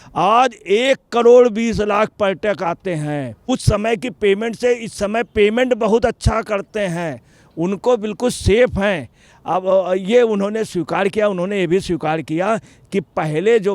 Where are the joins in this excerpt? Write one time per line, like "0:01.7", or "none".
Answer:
0:03.3